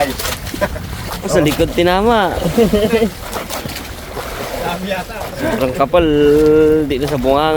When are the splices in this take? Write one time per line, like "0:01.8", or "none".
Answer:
0:01.1

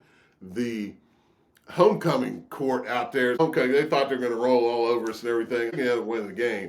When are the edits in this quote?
0:03.4
0:05.8

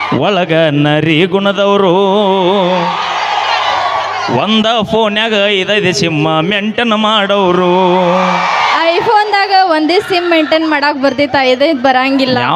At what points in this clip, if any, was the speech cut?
none

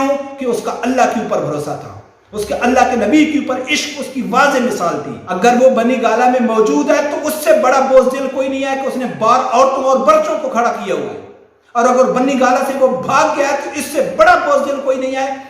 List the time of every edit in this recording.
0:05.2

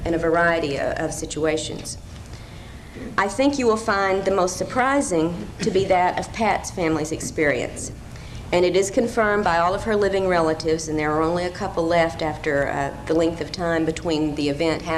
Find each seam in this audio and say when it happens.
0:12.0

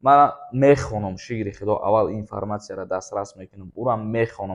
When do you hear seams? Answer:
none

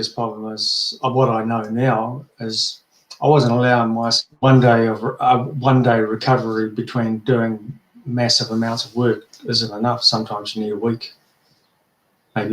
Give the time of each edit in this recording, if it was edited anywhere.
0:04.2

